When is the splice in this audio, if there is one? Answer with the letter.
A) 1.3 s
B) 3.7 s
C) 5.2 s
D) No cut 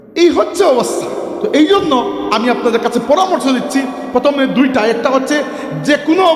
A